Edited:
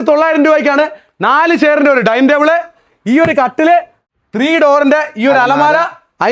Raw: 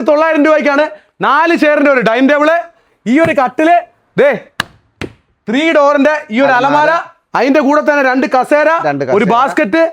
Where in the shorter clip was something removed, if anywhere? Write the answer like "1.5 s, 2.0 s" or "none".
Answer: 4.0 s